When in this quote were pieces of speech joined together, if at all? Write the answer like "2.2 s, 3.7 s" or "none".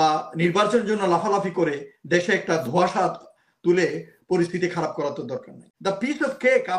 5.7 s